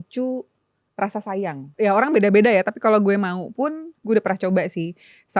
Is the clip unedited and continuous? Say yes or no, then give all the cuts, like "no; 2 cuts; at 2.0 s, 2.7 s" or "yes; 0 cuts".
no; 1 cut; at 1.7 s